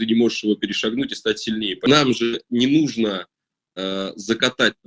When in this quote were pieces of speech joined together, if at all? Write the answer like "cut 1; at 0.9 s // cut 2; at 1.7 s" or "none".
cut 1; at 1.8 s